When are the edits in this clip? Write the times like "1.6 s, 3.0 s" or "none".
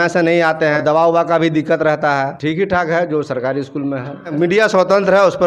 0.8 s, 2.3 s, 4.3 s